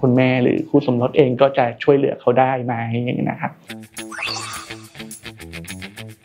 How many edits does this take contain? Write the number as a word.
one